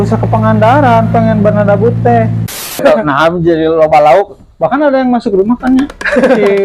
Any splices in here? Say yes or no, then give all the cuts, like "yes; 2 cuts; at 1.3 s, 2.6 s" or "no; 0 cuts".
yes; 1 cut; at 2.8 s